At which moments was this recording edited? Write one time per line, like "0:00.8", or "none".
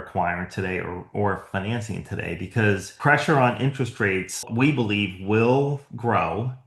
0:02.9
0:04.5